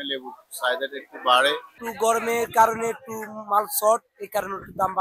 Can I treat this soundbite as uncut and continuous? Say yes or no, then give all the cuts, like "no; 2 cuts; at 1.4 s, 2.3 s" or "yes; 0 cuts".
no; 1 cut; at 1.7 s